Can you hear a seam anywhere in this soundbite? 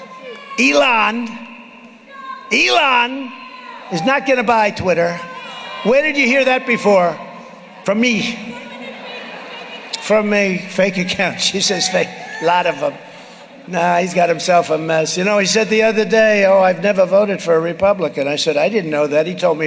no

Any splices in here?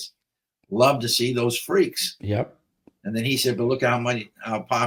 no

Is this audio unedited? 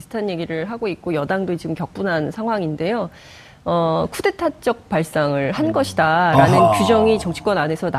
yes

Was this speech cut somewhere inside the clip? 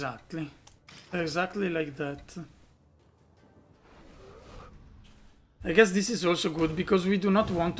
yes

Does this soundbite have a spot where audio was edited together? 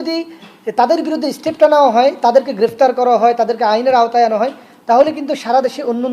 no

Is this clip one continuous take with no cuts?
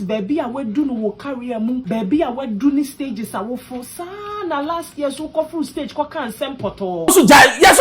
no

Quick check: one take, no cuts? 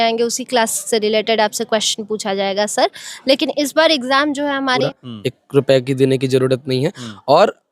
no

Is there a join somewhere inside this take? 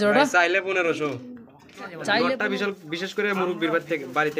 yes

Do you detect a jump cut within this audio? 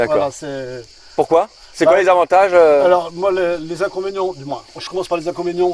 no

